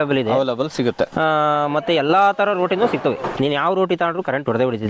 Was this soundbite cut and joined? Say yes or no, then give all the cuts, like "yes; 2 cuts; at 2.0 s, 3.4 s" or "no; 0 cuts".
yes; 1 cut; at 3.2 s